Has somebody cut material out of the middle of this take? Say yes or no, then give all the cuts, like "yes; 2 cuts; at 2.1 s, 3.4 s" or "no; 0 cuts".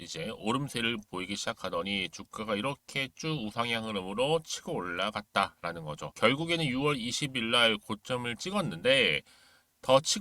yes; 1 cut; at 6.1 s